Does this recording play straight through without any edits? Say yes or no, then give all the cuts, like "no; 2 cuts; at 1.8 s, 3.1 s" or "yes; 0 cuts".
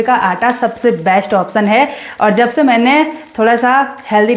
yes; 0 cuts